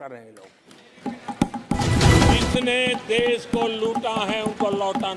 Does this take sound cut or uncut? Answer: cut